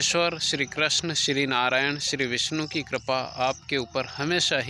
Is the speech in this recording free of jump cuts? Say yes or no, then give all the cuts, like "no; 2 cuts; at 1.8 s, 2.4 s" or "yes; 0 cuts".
yes; 0 cuts